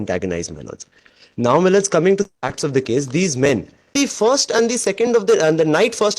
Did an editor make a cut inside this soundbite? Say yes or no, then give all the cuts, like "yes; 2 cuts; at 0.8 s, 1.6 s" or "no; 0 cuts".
yes; 1 cut; at 4.0 s